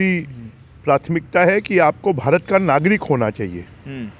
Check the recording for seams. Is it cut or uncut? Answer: uncut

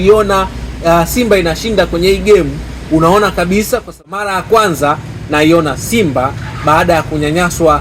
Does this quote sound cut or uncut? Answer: cut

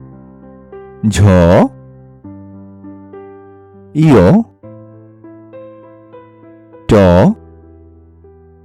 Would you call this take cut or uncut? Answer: cut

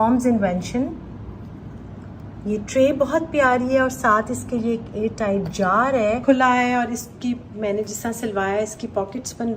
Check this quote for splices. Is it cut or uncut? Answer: cut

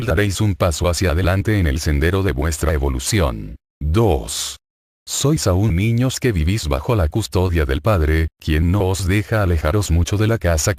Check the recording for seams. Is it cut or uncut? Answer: uncut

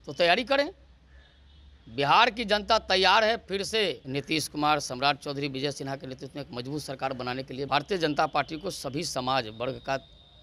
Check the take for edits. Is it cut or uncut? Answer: cut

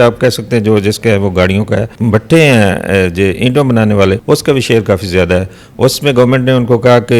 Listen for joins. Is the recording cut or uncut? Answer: cut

